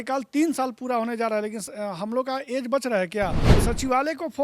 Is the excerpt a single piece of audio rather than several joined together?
no; 1 cut; at 3.5 s

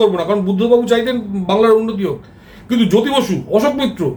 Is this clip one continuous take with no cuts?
yes; 0 cuts

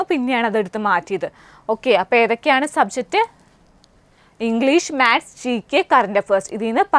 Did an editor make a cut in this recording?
no; 0 cuts

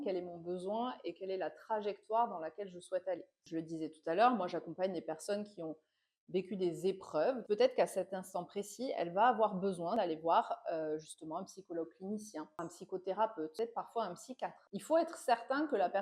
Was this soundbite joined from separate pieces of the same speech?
yes; 6 cuts; at 3.3 s, 7.4 s, 9.9 s, 12.6 s, 13.5 s, 14.6 s

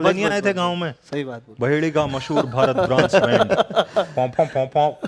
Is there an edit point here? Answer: no; 0 cuts

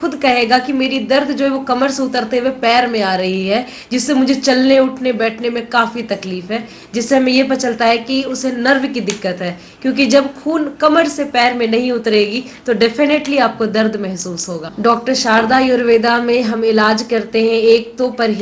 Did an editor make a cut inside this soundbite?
no; 0 cuts

